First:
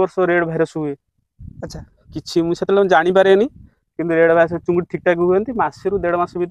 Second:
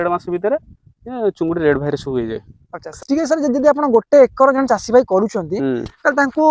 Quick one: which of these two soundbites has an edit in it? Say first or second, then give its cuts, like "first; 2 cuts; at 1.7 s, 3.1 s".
second; 1 cut; at 3.0 s